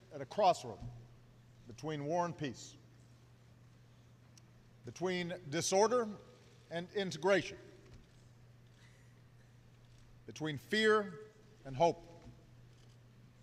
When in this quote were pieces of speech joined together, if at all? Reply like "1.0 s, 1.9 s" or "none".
none